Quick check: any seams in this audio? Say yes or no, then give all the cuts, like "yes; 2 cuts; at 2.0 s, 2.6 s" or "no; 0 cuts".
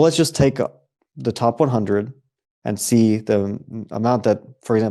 no; 0 cuts